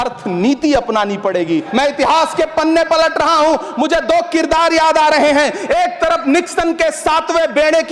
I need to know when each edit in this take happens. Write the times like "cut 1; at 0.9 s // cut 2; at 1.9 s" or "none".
cut 1; at 1.7 s